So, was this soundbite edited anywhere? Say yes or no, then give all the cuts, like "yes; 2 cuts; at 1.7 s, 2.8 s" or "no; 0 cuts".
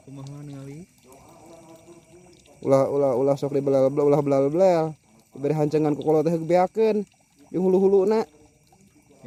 no; 0 cuts